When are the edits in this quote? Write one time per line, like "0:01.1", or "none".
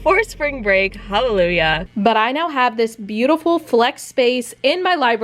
0:01.8

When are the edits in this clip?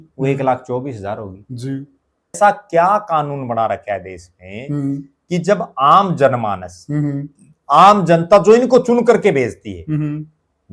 0:02.4

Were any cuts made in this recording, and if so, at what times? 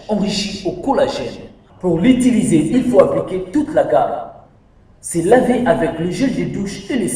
0:01.2

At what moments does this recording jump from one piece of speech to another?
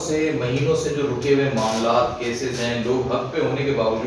none

